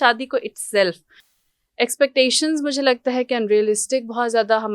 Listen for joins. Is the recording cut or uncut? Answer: uncut